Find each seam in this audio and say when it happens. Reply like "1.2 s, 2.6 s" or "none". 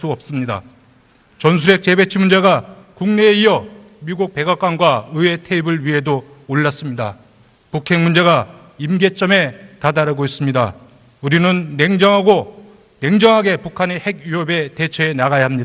7.7 s